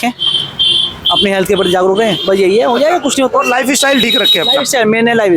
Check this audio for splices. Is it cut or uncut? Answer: uncut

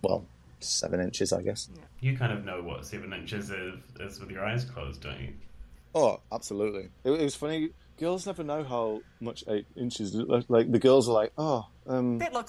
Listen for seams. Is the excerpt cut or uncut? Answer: cut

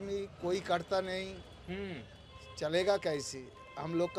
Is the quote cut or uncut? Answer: uncut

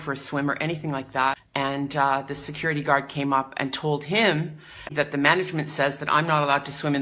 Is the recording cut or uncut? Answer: cut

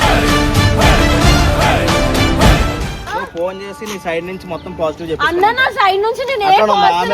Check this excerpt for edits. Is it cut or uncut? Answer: cut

